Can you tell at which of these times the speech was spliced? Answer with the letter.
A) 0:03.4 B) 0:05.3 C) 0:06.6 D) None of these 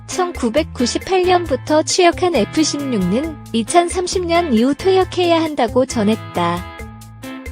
C